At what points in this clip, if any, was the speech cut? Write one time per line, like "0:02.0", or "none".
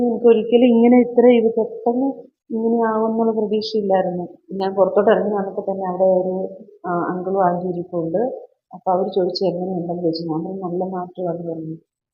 0:04.3